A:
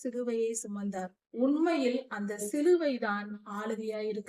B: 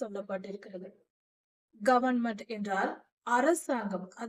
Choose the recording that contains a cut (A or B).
A